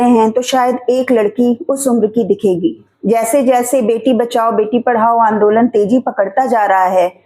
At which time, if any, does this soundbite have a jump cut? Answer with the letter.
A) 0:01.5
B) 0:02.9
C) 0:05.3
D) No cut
B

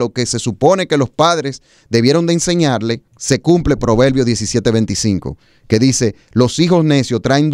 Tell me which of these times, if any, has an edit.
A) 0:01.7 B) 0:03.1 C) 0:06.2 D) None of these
B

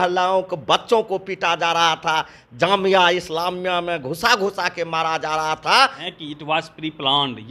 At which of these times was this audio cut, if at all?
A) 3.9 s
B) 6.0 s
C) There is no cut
B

